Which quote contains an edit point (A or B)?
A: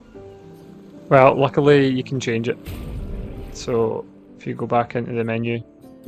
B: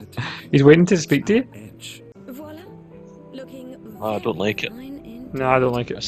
B